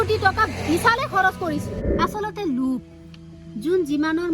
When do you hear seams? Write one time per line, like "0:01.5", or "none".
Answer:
0:01.8